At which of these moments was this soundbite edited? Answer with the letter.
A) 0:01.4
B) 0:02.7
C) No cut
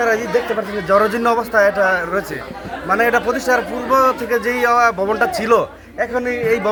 C